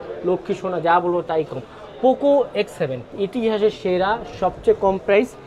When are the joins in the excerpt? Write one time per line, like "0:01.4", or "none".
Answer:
0:03.1

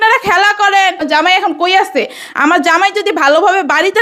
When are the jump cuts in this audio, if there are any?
0:01.0

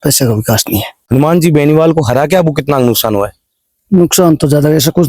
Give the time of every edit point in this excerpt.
0:00.9

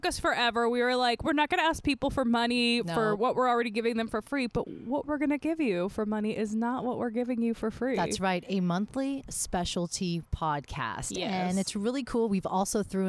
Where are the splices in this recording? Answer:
none

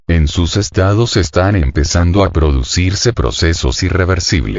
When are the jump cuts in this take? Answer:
none

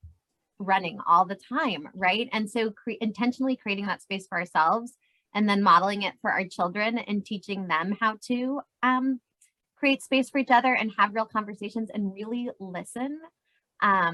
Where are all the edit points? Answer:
none

